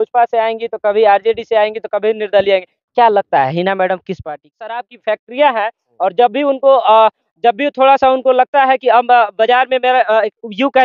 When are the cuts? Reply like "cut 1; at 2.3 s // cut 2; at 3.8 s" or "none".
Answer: cut 1; at 4.7 s